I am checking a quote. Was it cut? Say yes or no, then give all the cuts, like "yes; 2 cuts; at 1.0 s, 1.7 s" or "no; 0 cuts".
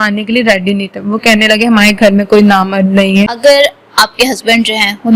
yes; 1 cut; at 3.3 s